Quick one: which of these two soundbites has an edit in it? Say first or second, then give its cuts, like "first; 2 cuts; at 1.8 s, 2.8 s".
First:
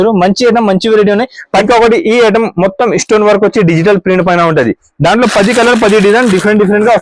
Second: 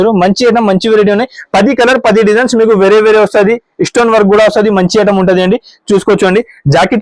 first; 1 cut; at 1.6 s